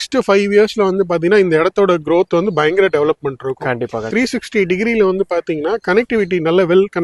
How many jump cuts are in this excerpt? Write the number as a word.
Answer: one